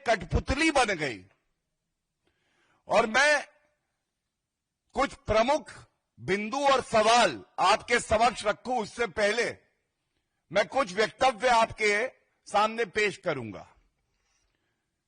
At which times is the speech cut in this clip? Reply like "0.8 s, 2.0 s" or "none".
none